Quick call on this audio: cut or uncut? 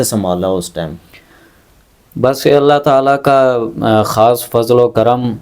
uncut